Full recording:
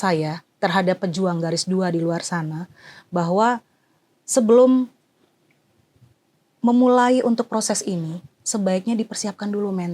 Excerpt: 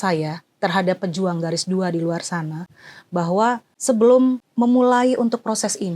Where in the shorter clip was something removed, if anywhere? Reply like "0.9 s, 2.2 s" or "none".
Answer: 3.7 s, 4.4 s